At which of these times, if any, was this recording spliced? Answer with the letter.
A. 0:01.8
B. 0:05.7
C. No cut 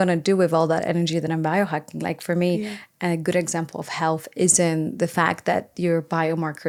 C